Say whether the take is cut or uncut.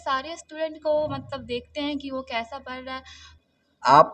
cut